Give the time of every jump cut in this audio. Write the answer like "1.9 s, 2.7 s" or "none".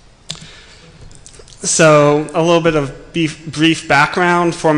2.1 s